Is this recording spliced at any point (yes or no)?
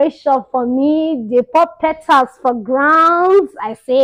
no